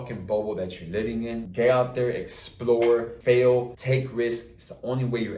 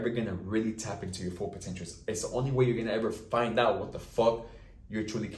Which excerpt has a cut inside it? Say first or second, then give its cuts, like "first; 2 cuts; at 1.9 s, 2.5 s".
first; 3 cuts; at 1.5 s, 3.1 s, 3.8 s